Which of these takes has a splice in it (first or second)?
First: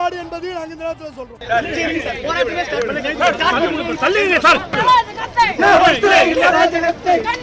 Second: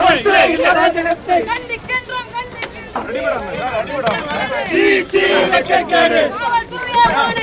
first